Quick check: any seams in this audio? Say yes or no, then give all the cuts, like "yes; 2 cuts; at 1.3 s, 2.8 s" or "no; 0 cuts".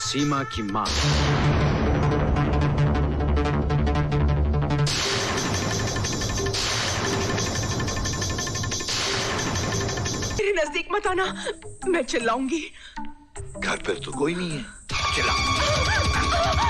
yes; 1 cut; at 10.4 s